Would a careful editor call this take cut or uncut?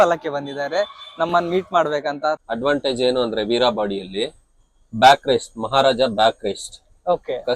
cut